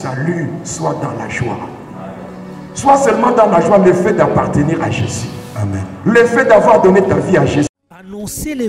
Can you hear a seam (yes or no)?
yes